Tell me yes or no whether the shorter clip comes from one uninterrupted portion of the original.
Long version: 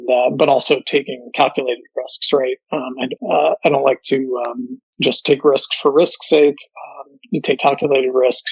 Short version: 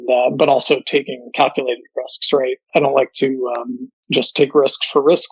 no